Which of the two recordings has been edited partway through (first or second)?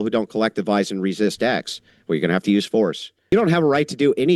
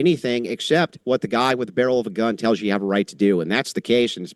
first